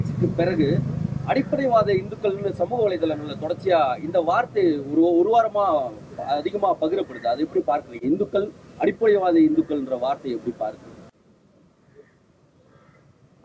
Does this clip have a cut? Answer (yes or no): no